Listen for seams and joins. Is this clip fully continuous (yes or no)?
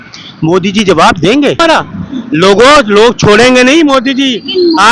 no